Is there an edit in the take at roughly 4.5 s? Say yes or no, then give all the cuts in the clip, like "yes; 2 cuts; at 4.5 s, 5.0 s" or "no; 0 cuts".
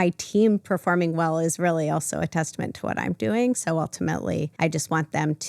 yes; 1 cut; at 4.5 s